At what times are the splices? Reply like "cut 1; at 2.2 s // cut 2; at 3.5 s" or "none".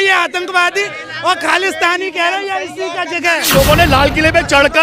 cut 1; at 3.4 s